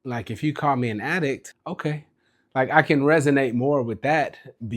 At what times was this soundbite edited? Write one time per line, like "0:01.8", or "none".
0:01.5